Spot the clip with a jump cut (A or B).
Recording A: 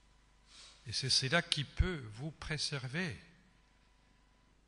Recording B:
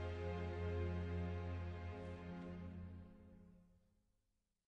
B